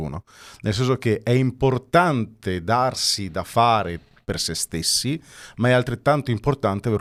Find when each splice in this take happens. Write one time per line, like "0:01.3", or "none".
none

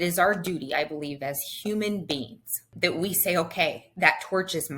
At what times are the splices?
0:02.7
0:03.9

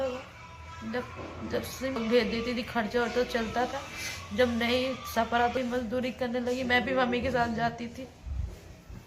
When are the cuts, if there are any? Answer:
0:02.0
0:05.6

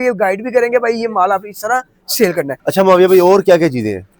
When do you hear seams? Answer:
0:02.6

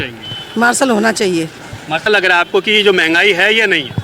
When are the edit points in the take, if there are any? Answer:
0:02.0

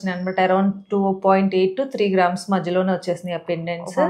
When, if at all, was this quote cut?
none

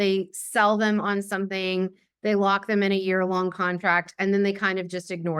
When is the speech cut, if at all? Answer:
none

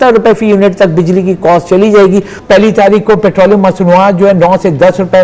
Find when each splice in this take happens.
0:02.3

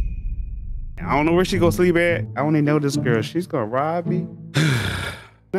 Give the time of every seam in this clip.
0:00.9

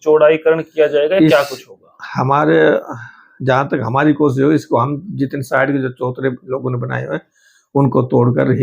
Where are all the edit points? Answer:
none

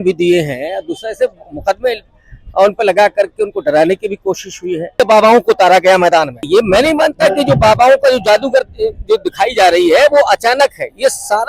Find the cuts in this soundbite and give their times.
0:05.0
0:06.4

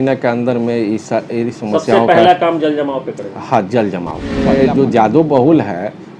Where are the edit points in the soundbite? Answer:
0:04.5

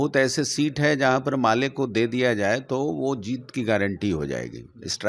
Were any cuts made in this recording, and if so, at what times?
none

